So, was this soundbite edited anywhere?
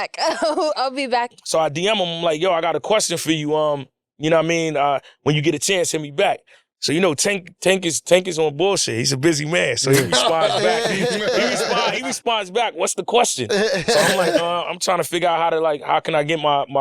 yes; 1 cut; at 1.3 s

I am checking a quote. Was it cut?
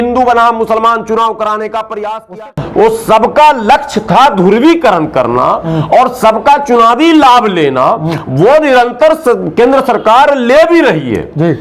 yes; 1 cut; at 2.5 s

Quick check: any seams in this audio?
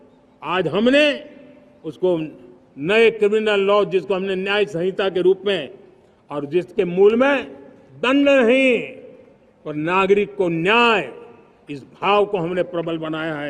no; 0 cuts

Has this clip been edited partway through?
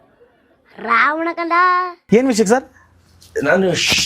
no; 0 cuts

